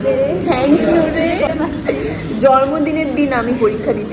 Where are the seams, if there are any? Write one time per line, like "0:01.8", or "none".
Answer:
0:01.5